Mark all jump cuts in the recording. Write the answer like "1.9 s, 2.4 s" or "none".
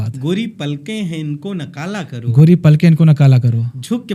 none